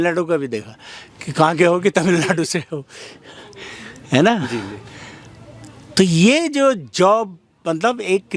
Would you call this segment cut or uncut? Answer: uncut